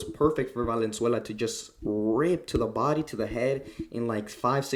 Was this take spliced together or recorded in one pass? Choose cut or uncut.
uncut